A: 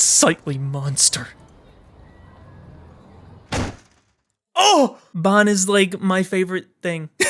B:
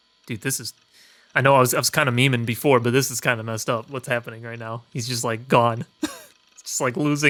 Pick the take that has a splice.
A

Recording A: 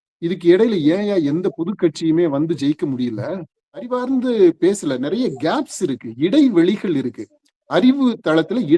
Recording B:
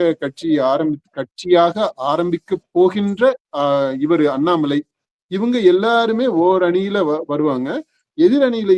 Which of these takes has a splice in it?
A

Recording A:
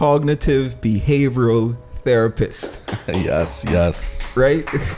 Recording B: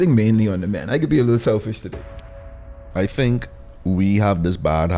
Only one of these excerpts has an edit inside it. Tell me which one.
B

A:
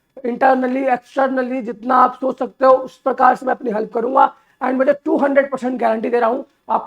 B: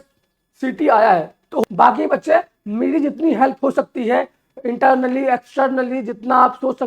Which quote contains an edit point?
B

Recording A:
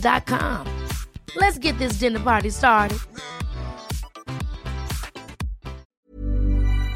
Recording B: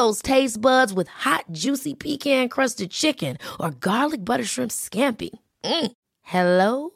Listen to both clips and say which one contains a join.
A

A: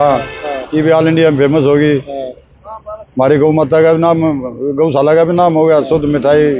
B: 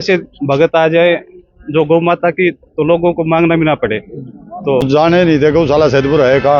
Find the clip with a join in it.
B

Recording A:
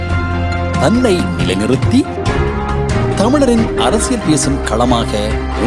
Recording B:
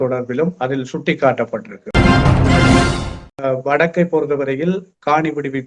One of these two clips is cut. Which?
B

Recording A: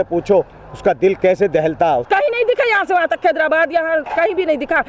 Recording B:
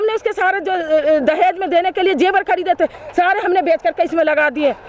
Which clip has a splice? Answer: A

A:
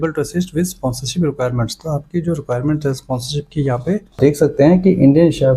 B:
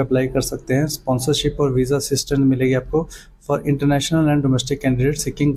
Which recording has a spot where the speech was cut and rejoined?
A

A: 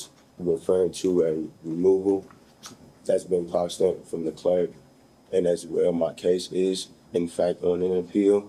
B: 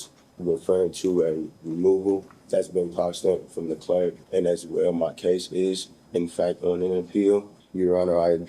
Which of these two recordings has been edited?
B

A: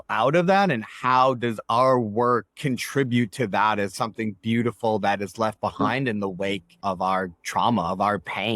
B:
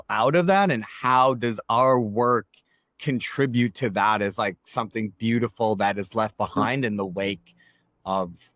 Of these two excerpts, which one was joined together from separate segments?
A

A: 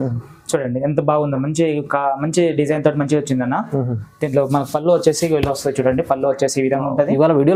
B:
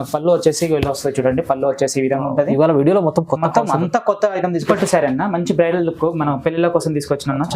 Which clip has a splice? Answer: B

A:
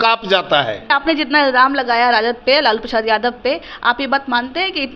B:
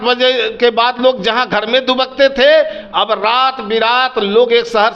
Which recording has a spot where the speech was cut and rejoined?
A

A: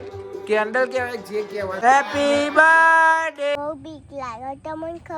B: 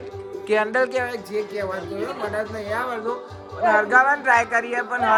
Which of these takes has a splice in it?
A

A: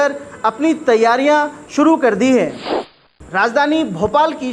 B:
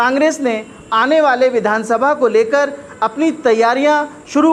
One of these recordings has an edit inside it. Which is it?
A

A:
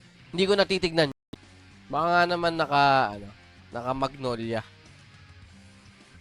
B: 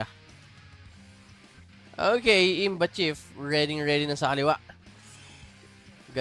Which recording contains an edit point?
A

